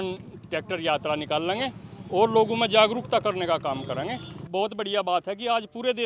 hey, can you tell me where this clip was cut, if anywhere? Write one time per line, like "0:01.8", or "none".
0:04.3